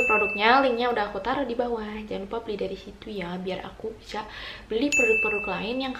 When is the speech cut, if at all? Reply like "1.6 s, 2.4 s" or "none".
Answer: none